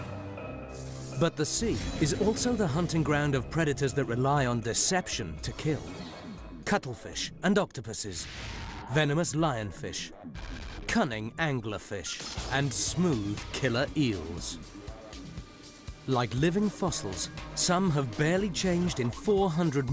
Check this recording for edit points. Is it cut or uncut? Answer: cut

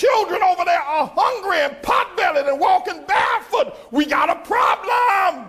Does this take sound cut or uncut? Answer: uncut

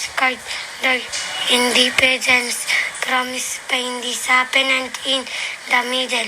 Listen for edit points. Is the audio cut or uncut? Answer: cut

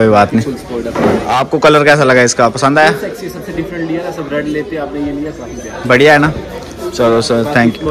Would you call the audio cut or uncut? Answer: uncut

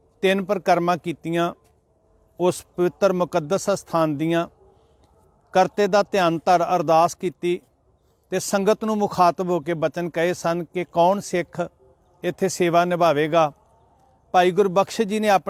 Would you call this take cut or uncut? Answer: uncut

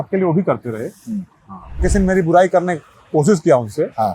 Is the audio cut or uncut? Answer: cut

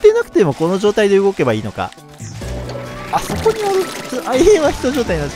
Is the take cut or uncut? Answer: uncut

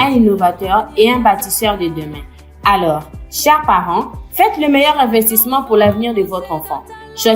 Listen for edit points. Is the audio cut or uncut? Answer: uncut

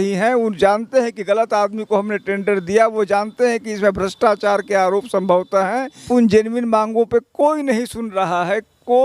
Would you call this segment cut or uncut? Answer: cut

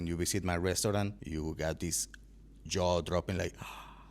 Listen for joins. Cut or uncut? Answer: cut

